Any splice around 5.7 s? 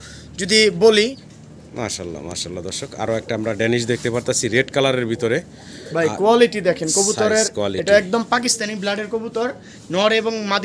no; 1 cut; at 1.2 s

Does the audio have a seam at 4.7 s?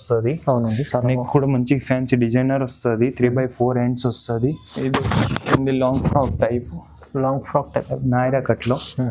yes; 1 cut; at 4.7 s

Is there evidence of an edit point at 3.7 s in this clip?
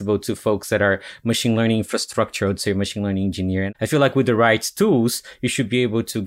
yes; 1 cut; at 3.7 s

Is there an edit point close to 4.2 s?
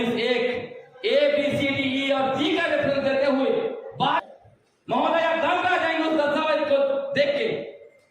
yes; 1 cut; at 4.2 s

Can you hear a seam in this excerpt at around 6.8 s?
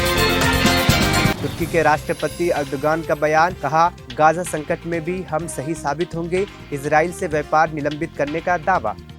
no; 1 cut; at 1.4 s

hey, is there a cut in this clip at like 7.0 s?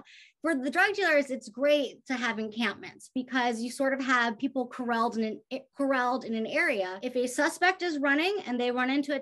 yes; 1 cut; at 7.0 s

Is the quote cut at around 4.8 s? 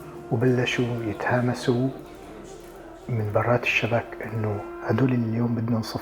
yes; 1 cut; at 4.8 s

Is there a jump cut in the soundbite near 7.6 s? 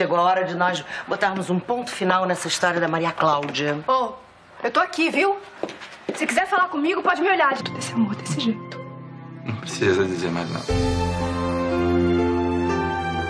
no; 0 cuts

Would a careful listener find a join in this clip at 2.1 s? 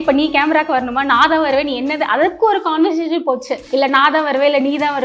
no; 1 cut; at 3.6 s

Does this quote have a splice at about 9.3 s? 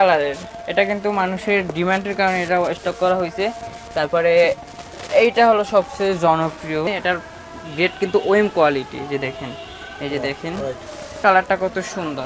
no; 2 cuts; at 6.9 s, 11.1 s

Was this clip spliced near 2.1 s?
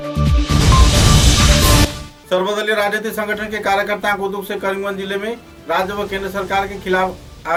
no; 0 cuts

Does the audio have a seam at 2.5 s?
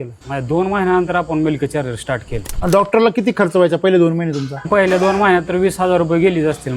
yes; 2 cuts; at 2.5 s, 4.7 s

